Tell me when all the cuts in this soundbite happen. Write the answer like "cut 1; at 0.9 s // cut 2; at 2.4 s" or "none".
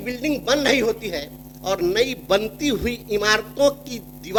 none

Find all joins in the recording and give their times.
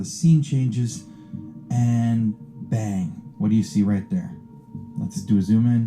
cut 1; at 3.1 s

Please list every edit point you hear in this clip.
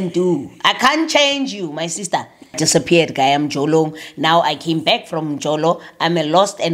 cut 1; at 2.6 s

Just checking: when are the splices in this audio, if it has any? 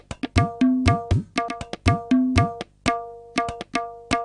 none

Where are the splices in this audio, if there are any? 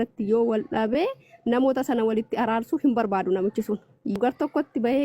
cut 1; at 4.2 s

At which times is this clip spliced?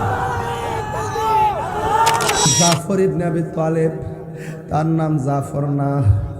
cut 1; at 2.5 s

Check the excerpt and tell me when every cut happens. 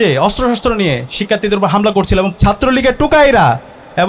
cut 1; at 2.3 s

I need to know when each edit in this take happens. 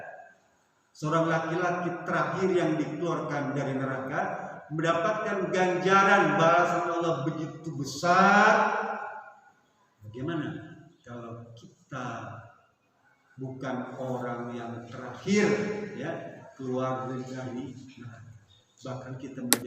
none

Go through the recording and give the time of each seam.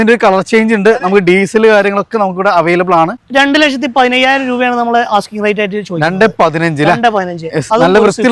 cut 1; at 3.2 s

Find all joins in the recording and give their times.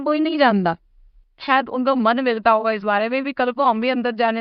cut 1; at 1.3 s

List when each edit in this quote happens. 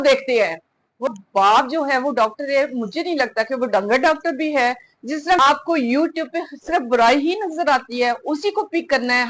cut 1; at 1.1 s // cut 2; at 5.4 s

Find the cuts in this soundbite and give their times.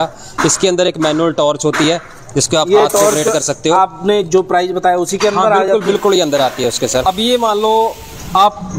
cut 1; at 6.9 s

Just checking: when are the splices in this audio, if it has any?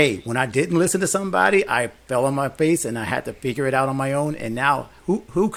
none

